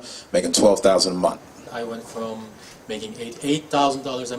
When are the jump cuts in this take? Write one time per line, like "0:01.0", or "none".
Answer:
0:01.7